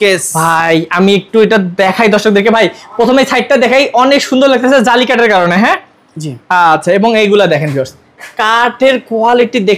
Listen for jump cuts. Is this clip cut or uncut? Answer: uncut